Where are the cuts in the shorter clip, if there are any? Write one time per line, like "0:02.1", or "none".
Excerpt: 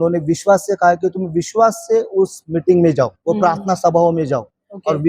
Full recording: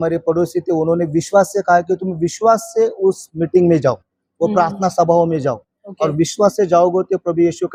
0:03.2